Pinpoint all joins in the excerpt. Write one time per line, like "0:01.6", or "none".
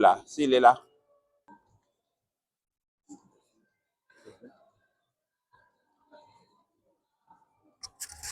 0:01.5